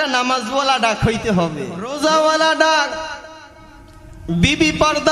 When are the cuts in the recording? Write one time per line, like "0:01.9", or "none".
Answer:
0:01.9